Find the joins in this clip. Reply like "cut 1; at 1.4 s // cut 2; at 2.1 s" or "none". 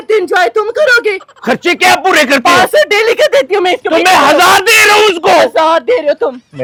none